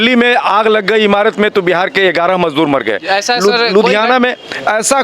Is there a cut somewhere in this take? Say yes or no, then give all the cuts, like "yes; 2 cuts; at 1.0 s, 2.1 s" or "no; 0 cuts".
no; 0 cuts